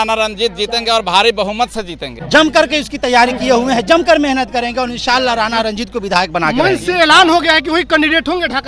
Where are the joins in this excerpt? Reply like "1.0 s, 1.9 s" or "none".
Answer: 2.2 s